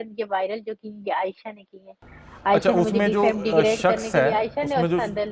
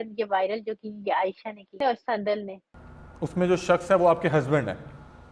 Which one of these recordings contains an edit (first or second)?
second